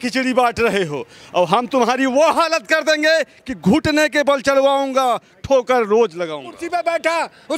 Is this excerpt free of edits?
no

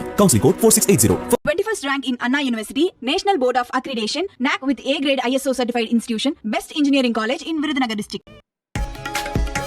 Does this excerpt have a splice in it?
yes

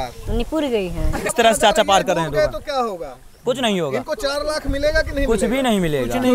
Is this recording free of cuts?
no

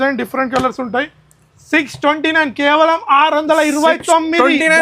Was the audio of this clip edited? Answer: no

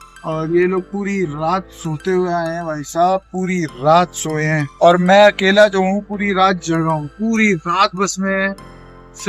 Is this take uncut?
no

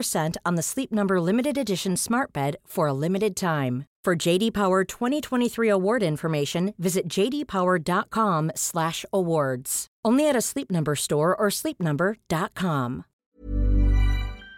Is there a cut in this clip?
yes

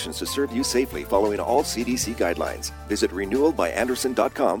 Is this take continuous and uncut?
yes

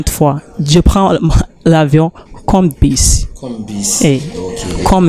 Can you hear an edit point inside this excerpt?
no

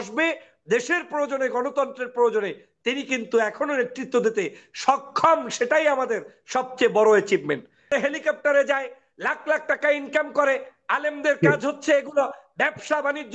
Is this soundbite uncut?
no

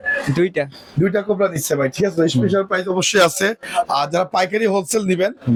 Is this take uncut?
yes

